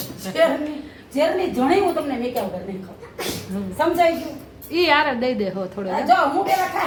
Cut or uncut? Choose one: uncut